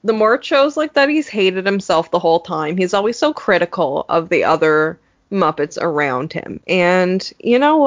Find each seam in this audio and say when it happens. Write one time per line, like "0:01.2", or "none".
none